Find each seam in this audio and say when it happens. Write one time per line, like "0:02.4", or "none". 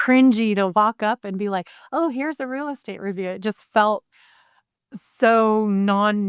none